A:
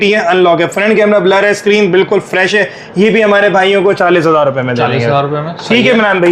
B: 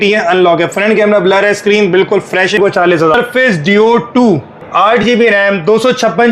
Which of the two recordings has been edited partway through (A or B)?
B